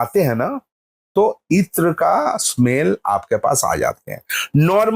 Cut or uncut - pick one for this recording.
uncut